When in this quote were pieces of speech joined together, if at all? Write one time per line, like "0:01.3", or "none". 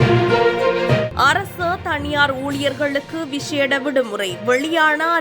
0:01.1